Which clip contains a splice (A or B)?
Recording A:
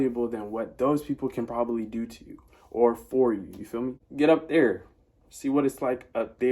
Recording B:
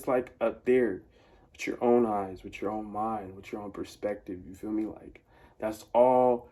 A